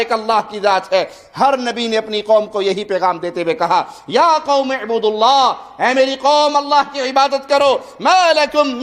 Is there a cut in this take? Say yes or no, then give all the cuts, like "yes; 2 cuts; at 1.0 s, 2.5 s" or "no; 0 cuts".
no; 0 cuts